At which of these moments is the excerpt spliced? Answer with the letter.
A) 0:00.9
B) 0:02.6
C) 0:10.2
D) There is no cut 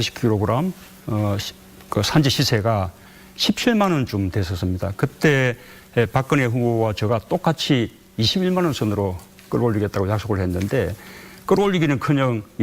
B